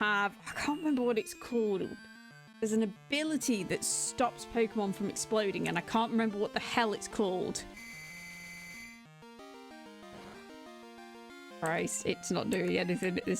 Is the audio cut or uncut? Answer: cut